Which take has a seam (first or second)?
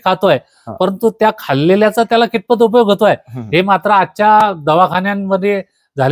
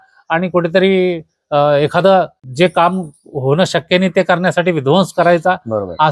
second